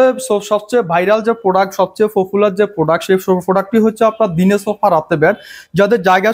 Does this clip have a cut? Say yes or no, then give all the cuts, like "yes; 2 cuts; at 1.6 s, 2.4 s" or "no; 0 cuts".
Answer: no; 0 cuts